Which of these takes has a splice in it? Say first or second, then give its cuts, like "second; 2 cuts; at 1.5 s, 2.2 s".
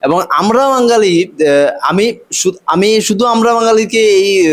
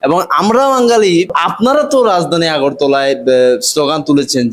second; 1 cut; at 1.3 s